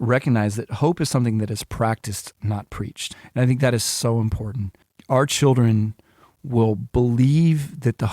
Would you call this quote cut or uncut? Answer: cut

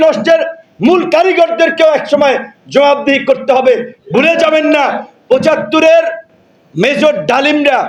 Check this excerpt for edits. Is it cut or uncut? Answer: uncut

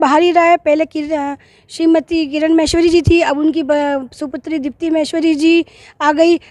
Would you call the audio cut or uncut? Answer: uncut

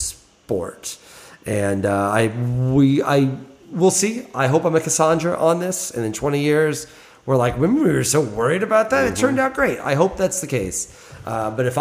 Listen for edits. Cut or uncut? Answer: uncut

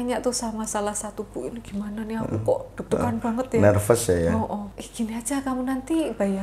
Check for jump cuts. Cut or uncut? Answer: cut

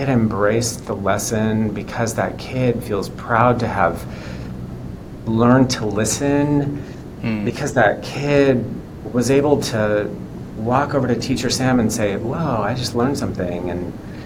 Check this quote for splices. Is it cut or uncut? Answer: uncut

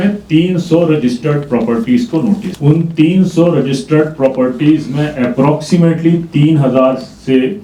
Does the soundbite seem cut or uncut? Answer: cut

